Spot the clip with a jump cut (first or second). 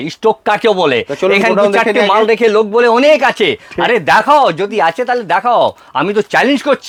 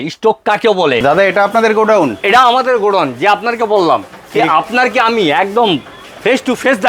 second